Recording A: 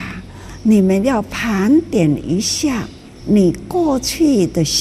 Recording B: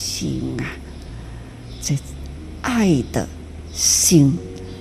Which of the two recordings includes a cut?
A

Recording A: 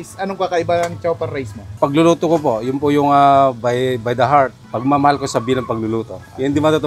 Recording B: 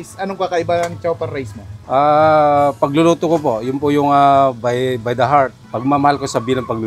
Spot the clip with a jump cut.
A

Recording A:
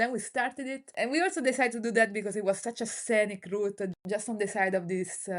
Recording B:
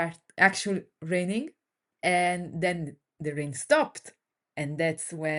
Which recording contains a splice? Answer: A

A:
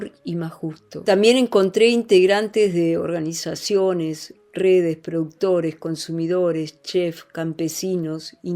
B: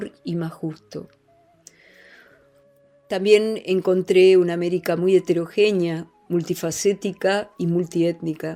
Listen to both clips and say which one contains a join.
A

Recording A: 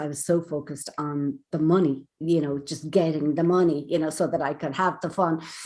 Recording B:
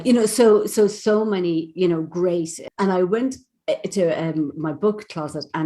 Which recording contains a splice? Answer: B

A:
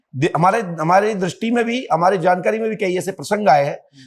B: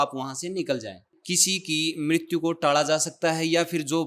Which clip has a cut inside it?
B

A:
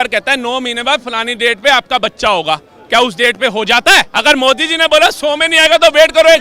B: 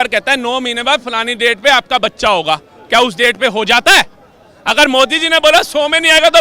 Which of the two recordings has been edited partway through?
A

